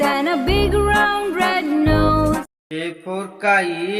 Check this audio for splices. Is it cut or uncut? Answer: cut